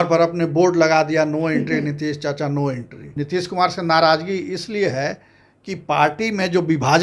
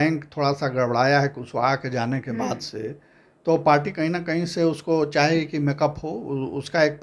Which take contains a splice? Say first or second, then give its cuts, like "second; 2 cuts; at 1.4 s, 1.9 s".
first; 1 cut; at 3.0 s